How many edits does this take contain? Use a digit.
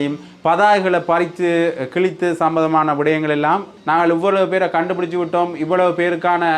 1